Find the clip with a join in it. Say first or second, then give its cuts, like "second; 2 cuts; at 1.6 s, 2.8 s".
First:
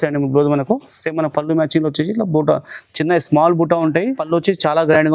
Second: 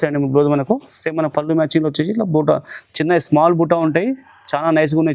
first; 1 cut; at 4.2 s